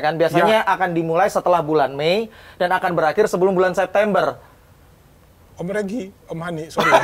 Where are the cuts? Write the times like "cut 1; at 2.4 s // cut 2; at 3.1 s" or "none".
none